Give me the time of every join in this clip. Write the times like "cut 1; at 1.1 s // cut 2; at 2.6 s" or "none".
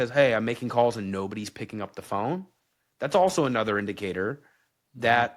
none